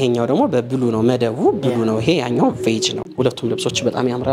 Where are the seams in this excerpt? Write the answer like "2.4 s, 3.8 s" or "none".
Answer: 3.1 s